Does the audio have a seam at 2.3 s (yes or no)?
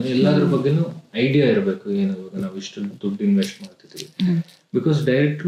no